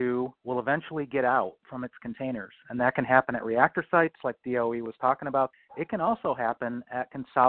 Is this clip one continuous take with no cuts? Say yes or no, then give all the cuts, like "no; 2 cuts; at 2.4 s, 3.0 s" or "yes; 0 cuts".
no; 1 cut; at 5.5 s